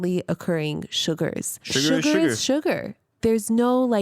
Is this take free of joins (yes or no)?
no